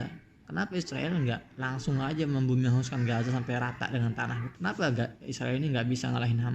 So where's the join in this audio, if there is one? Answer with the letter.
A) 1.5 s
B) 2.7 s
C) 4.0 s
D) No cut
D